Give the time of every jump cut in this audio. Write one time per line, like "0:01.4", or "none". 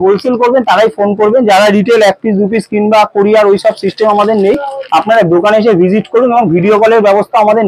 none